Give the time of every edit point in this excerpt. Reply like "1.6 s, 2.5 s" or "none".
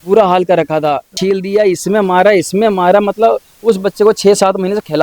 1.2 s